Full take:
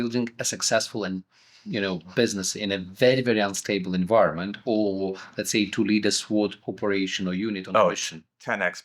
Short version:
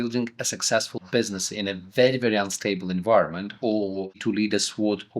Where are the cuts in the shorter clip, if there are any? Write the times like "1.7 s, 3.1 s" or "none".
1.0 s, 4.2 s